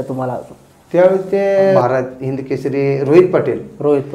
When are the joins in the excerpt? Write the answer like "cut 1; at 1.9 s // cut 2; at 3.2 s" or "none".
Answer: cut 1; at 1.8 s